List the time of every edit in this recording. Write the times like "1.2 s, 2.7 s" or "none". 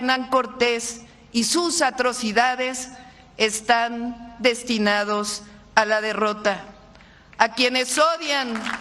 none